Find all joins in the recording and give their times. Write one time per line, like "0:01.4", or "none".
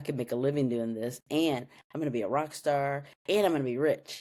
none